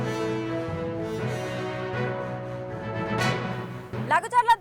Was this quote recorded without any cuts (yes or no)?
yes